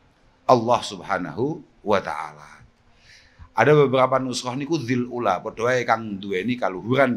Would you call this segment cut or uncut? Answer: uncut